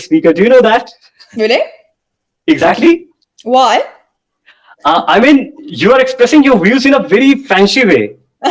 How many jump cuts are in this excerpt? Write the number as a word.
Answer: zero